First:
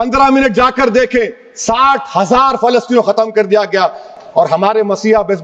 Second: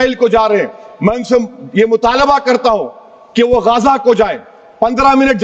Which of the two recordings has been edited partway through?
first; 1 cut; at 4.2 s

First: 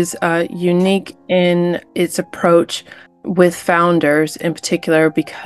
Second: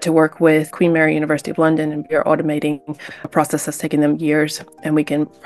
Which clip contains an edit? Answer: second; 1 cut; at 2.0 s

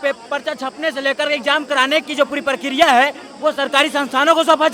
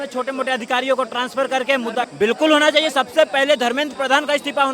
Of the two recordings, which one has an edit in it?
second; 1 cut; at 2.1 s

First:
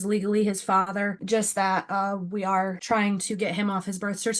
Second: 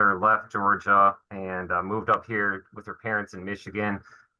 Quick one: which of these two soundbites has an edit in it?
first; 2 cuts; at 1.2 s, 2.8 s

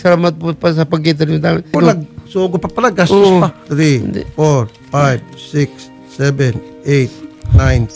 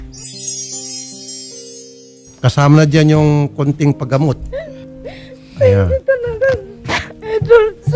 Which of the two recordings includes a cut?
first; 1 cut; at 3.6 s

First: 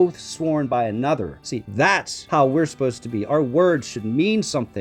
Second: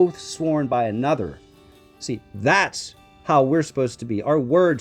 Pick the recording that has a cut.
first; 1 cut; at 1.9 s

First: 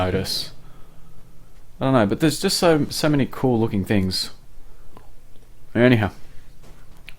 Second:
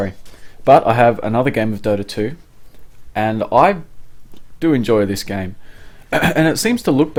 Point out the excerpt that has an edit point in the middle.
first; 1 cut; at 4.0 s

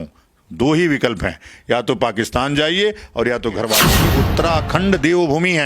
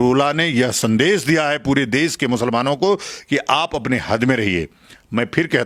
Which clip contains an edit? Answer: first; 1 cut; at 4.0 s

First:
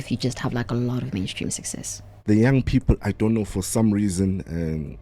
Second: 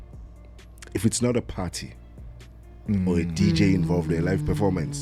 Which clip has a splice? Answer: first; 1 cut; at 2.1 s

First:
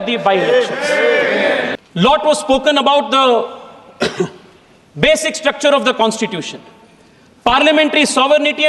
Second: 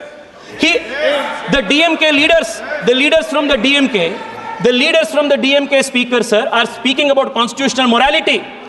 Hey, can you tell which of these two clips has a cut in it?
first; 1 cut; at 1.7 s

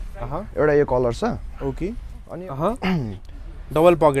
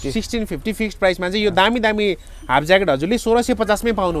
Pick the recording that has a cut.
first; 1 cut; at 2.3 s

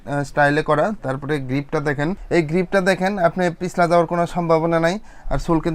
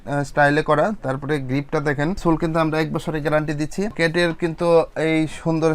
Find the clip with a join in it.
second; 2 cuts; at 2.2 s, 4.0 s

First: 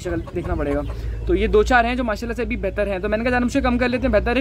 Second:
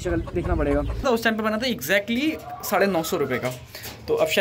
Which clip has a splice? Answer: second; 1 cut; at 1.0 s

